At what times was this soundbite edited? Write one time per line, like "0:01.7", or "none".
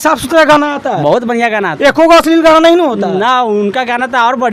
none